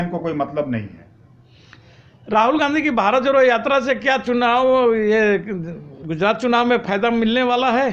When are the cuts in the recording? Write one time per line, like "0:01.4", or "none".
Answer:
none